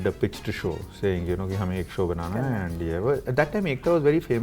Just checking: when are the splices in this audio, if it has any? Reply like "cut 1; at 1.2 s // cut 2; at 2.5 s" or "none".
none